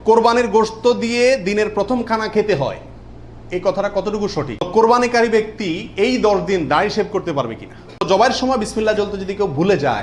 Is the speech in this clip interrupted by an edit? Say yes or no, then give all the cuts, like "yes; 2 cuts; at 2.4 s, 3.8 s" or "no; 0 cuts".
yes; 2 cuts; at 4.5 s, 8.0 s